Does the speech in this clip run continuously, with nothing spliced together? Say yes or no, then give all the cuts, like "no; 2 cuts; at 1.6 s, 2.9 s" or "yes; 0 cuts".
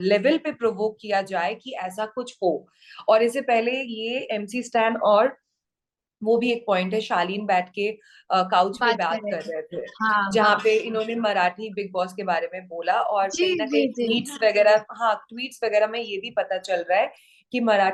yes; 0 cuts